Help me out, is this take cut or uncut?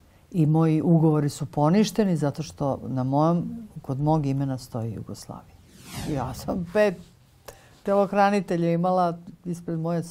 cut